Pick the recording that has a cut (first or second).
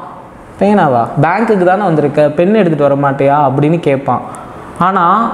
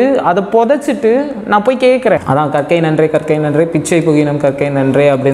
second